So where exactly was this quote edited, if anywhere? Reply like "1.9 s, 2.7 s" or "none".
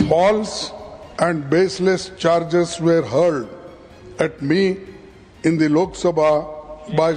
none